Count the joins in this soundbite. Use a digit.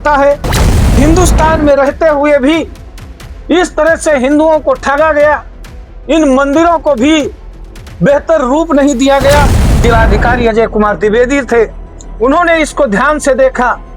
2